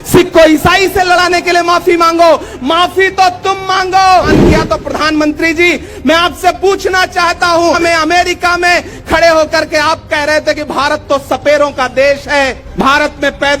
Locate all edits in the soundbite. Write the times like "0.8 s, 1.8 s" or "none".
4.3 s, 7.8 s, 12.6 s